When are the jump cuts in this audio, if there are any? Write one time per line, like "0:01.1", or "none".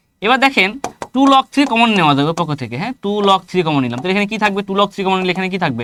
none